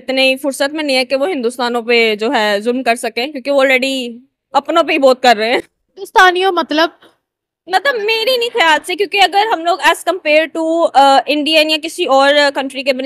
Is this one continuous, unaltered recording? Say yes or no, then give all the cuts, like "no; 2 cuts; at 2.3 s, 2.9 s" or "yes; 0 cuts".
yes; 0 cuts